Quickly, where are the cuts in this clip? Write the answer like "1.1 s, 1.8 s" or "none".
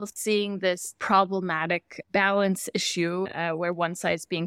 0.9 s, 1.9 s, 3.3 s